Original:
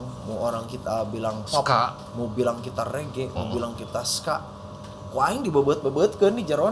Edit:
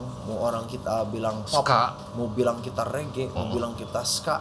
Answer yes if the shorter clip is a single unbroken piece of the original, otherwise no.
yes